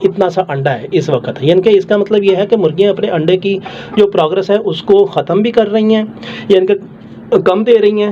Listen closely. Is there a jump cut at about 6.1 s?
no; 0 cuts

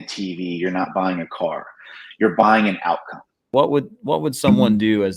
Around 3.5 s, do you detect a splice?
yes; 1 cut; at 3.5 s

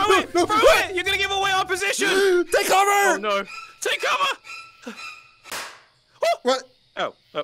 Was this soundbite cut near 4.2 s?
no; 0 cuts

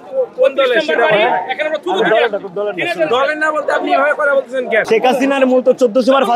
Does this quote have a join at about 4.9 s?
yes; 1 cut; at 4.9 s

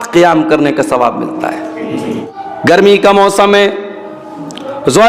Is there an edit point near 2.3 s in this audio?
yes; 1 cut; at 2.3 s

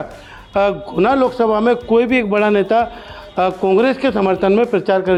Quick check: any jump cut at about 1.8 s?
no; 0 cuts

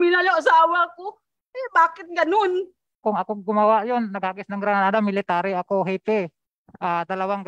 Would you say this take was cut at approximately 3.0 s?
yes; 1 cut; at 3.0 s

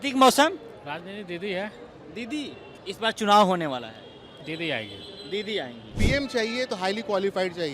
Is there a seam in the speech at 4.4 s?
no; 2 cuts; at 2.7 s, 5.9 s

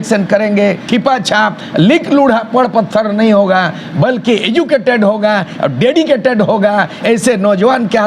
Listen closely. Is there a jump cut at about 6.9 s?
yes; 2 cuts; at 0.8 s, 6.9 s

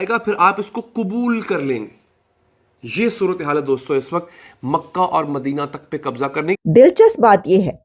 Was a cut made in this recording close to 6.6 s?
yes; 1 cut; at 6.6 s

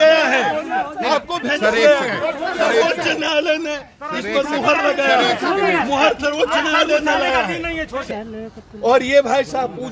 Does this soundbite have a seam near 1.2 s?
no; 1 cut; at 8.1 s

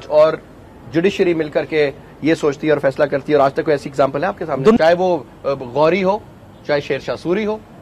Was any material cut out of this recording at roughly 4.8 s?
yes; 1 cut; at 4.8 s

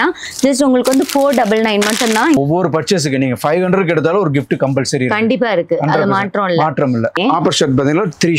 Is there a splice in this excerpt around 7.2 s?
yes; 2 cuts; at 2.4 s, 7.2 s

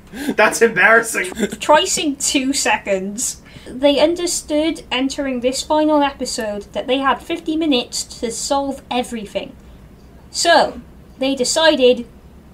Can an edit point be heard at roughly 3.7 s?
yes; 2 cuts; at 1.3 s, 3.7 s

